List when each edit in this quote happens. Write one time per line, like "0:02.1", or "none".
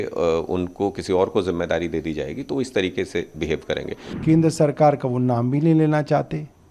0:04.0